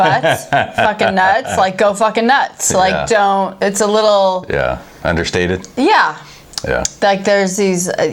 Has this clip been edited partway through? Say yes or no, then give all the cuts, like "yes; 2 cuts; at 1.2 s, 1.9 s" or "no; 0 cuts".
no; 0 cuts